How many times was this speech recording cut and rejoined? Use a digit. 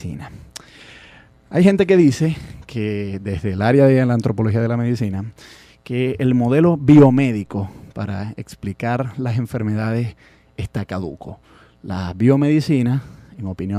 0